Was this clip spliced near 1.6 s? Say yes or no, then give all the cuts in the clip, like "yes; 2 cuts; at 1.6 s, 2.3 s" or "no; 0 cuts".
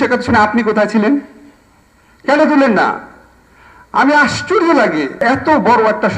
no; 1 cut; at 5.2 s